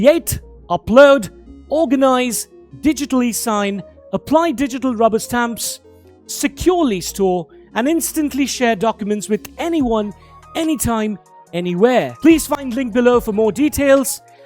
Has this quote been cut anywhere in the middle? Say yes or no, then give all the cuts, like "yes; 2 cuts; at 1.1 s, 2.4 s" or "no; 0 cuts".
yes; 1 cut; at 12.1 s